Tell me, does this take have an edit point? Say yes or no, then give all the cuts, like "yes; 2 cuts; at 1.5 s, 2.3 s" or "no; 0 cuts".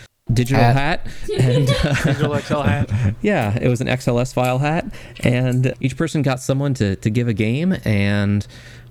no; 0 cuts